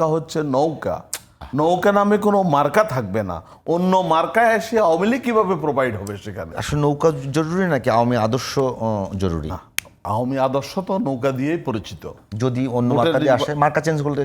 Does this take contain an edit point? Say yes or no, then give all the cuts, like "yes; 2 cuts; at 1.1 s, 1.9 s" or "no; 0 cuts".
yes; 1 cut; at 6.5 s